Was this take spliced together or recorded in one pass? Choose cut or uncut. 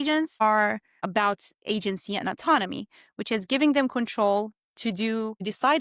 cut